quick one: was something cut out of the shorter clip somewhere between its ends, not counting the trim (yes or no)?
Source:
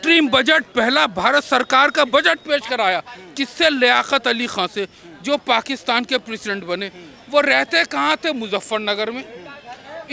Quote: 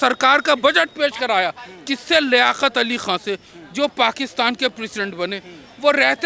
no